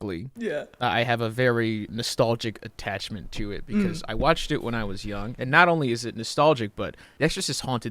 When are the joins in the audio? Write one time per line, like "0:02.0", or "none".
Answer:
0:01.9
0:07.0

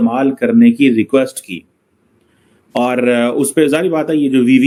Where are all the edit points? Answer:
none

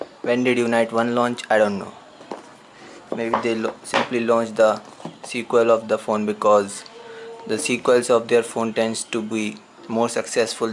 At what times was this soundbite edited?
0:04.1

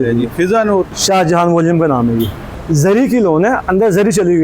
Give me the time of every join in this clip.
0:01.0
0:02.5

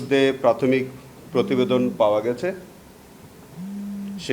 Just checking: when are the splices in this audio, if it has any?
none

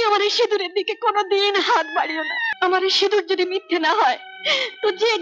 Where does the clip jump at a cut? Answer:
0:02.4

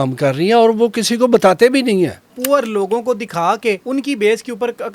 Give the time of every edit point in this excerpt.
0:02.4
0:03.8

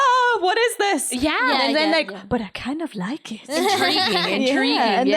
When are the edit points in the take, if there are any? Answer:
none

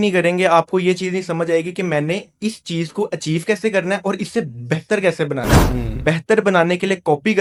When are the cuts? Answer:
none

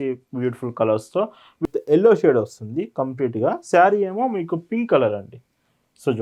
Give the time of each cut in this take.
0:01.6

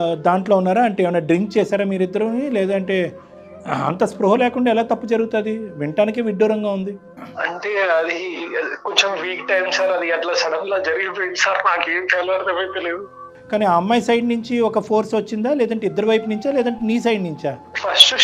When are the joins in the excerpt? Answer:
none

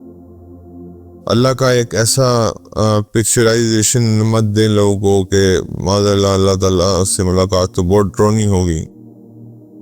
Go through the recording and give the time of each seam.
0:01.2

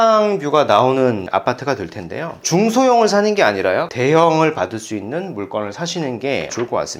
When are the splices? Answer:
0:01.2
0:03.9

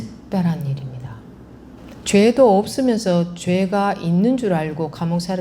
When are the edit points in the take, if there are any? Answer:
0:01.8

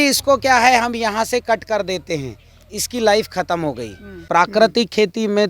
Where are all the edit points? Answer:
0:04.2

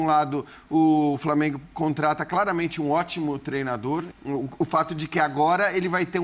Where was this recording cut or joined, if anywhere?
0:04.1

